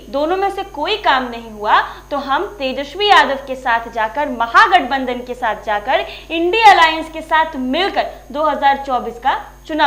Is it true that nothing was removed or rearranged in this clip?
yes; 0 cuts

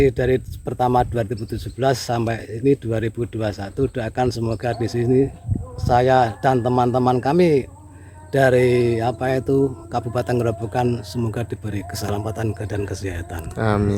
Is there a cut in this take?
no; 0 cuts

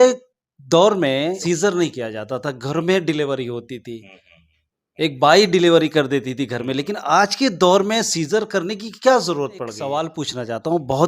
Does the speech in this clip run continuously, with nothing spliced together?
no; 2 cuts; at 1.4 s, 9.8 s

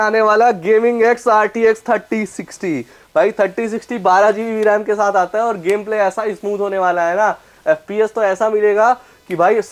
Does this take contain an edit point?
no; 0 cuts

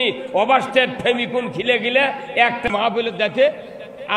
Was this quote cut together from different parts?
yes; 1 cut; at 2.7 s

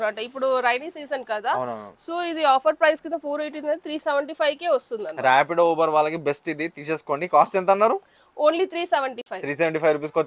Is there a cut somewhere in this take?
no; 0 cuts

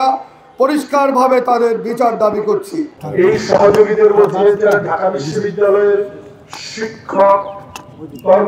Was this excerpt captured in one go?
no; 1 cut; at 3.0 s

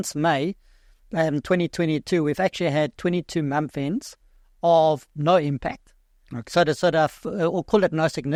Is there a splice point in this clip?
no; 0 cuts

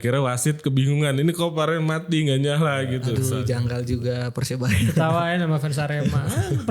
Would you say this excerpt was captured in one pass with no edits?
no; 1 cut; at 3.1 s

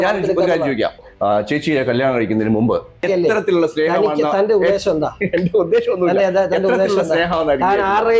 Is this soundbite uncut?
no; 2 cuts; at 1.0 s, 3.0 s

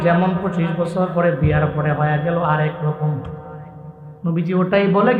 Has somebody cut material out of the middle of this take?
no; 0 cuts

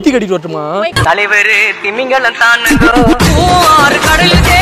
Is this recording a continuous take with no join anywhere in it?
yes; 0 cuts

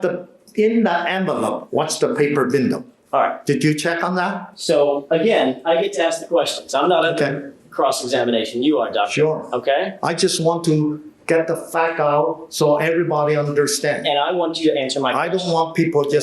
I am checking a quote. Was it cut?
no; 0 cuts

